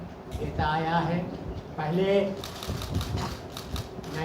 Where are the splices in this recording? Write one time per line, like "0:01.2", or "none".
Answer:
none